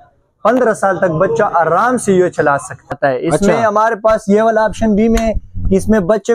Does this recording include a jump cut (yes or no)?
yes